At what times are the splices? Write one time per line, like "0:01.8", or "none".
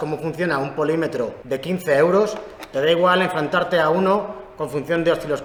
none